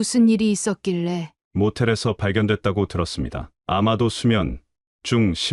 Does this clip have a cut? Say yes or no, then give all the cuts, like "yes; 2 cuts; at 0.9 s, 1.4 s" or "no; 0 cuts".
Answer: yes; 1 cut; at 1.3 s